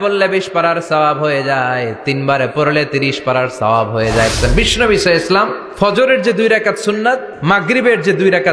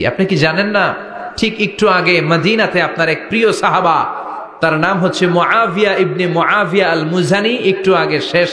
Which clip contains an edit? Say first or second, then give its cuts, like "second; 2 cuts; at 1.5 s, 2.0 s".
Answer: first; 3 cuts; at 4.3 s, 5.6 s, 7.3 s